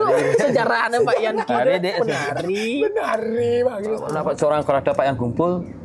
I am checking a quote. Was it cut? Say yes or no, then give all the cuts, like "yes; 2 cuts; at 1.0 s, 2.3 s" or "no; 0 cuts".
yes; 1 cut; at 4.1 s